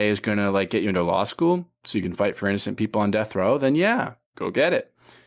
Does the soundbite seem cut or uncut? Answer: cut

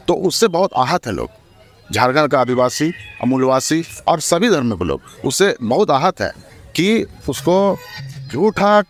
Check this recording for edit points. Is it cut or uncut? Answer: uncut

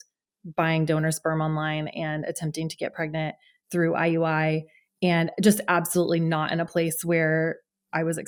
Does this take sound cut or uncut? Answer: uncut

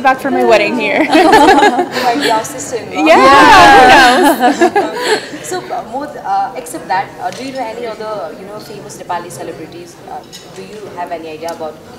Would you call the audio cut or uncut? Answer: uncut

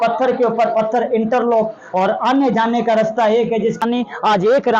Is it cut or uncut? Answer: cut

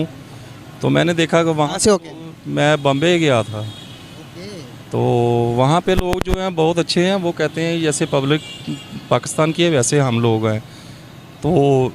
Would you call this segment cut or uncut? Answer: uncut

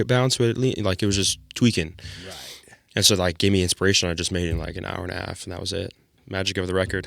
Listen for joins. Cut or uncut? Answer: cut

